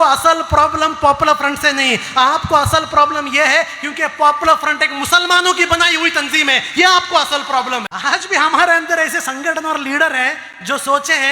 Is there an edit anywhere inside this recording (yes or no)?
yes